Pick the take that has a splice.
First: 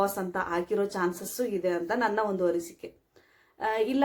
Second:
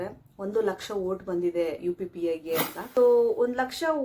second; 1 cut; at 2.8 s

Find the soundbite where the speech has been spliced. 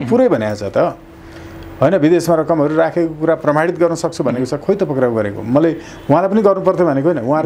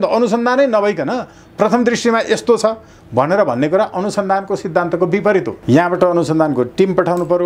second; 1 cut; at 5.5 s

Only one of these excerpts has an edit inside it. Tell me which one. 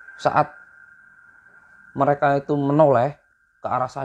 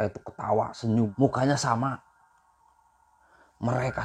second; 1 cut; at 1.1 s

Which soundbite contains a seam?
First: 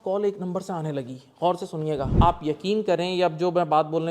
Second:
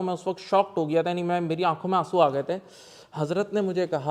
first; 1 cut; at 2.1 s

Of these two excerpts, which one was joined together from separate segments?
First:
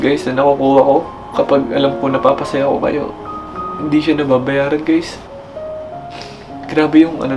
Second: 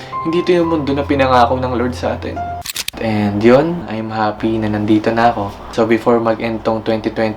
second; 1 cut; at 2.9 s

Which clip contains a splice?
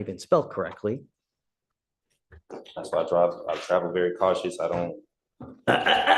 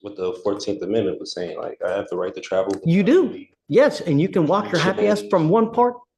first; 1 cut; at 1.6 s

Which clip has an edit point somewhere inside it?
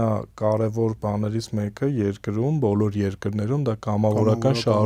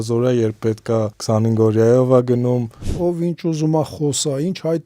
second; 2 cuts; at 1.2 s, 2.9 s

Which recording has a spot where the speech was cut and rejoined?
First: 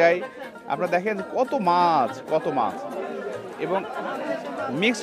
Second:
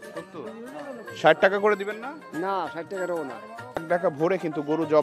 second; 1 cut; at 3.8 s

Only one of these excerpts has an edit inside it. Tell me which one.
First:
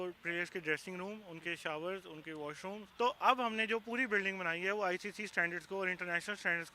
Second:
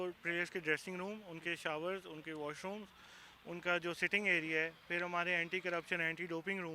first; 1 cut; at 2.8 s

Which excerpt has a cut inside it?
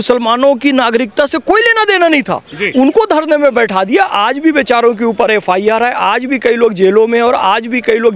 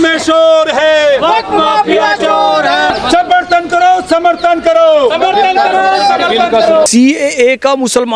second; 2 cuts; at 2.9 s, 6.9 s

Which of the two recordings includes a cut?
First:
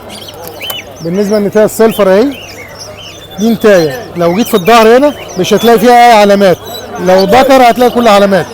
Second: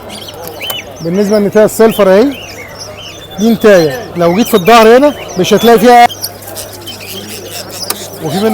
second; 1 cut; at 6.1 s

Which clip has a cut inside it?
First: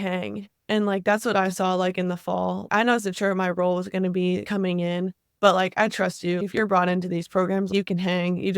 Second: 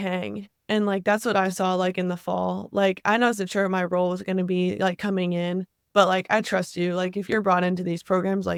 first; 4 cuts; at 2.7 s, 4.4 s, 6.4 s, 7.7 s

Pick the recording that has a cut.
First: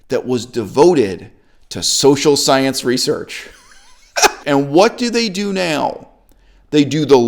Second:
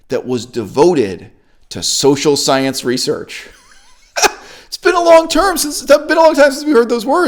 first; 1 cut; at 4.4 s

